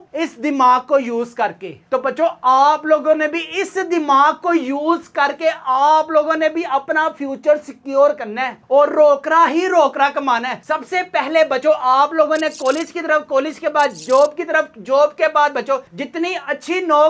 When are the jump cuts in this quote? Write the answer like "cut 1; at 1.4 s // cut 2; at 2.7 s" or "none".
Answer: none